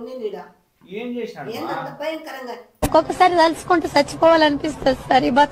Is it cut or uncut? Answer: cut